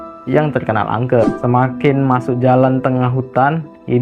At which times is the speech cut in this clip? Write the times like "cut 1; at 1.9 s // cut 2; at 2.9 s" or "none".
cut 1; at 1.2 s